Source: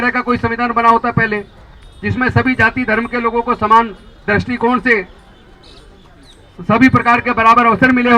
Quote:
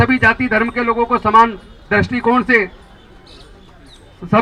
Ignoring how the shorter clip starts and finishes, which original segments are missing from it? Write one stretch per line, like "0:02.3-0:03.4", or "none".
none

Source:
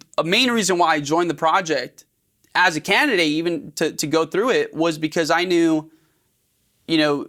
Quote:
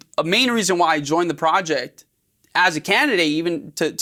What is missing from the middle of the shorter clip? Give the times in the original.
none

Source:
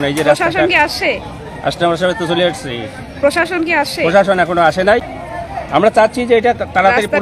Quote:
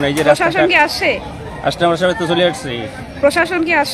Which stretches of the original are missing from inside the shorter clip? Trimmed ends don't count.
none

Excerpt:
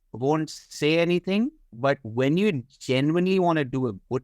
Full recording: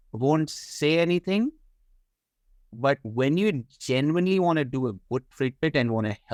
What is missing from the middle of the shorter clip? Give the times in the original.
0:01.6-0:02.6

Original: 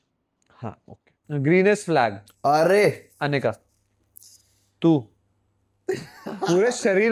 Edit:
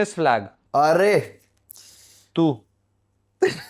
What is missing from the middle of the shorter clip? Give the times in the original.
0:03.1-0:03.8

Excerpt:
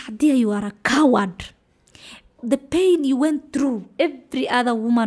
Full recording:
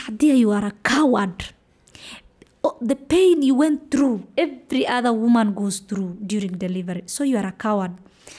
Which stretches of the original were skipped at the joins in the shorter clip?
0:02.4-0:02.8

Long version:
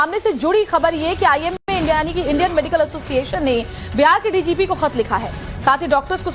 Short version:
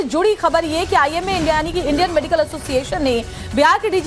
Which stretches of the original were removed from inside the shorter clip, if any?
0:01.5-0:01.6

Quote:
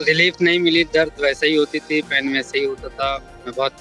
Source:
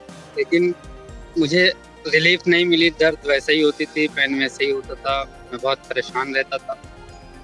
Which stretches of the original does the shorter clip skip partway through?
none

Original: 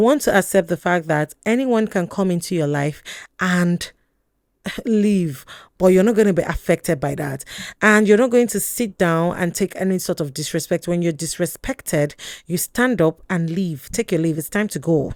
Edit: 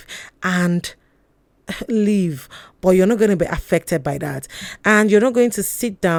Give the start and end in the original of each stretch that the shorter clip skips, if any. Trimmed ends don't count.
none

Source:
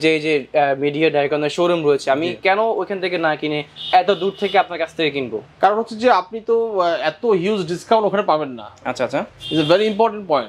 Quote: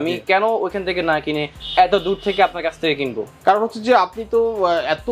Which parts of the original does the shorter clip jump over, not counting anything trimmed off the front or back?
none

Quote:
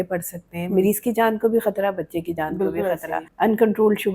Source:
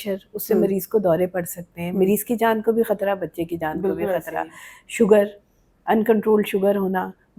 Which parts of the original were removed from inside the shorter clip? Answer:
0:04.4-0:05.7

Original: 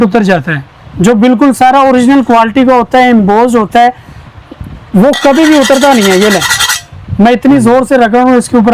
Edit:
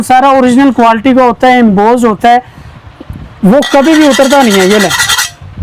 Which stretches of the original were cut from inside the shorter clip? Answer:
none

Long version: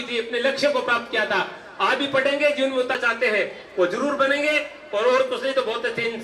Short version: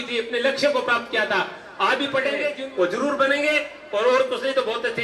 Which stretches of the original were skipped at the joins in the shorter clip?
0:02.6-0:03.6

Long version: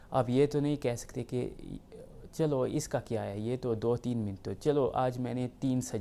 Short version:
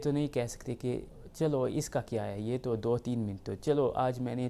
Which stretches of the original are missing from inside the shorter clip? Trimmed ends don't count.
0:01.7-0:02.2

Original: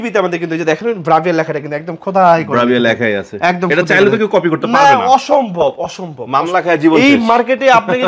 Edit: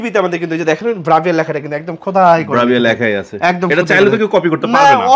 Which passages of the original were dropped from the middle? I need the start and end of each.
none

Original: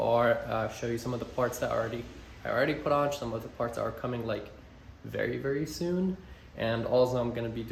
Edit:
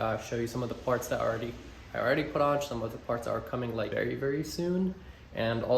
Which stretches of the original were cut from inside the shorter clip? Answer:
0:04.4-0:05.1

